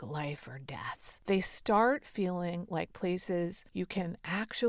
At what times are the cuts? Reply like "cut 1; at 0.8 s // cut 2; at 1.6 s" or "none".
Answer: cut 1; at 1.0 s // cut 2; at 3.6 s